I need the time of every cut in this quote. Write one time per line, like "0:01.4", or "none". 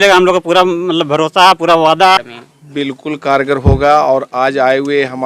none